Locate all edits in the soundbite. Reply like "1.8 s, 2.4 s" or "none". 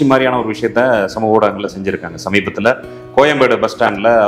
none